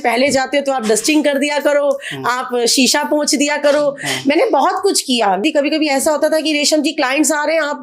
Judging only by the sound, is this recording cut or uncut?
cut